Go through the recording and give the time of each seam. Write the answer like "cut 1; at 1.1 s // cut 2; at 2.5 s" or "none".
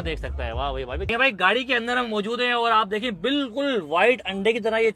cut 1; at 1.1 s